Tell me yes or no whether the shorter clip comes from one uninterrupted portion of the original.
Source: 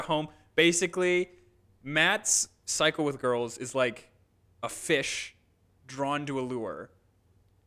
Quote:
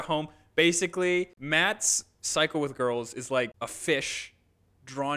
no